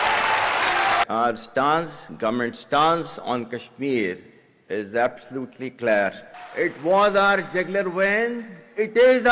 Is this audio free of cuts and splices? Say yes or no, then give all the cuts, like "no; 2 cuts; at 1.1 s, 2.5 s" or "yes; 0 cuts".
no; 1 cut; at 1.0 s